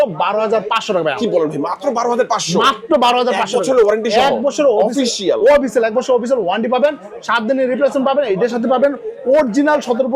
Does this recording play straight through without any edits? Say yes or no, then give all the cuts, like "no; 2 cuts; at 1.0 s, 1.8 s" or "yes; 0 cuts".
yes; 0 cuts